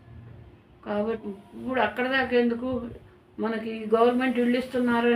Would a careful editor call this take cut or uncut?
cut